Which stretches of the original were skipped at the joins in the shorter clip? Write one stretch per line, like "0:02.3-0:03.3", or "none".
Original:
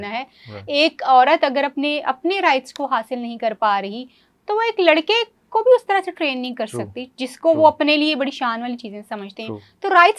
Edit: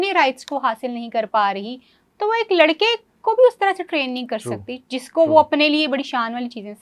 none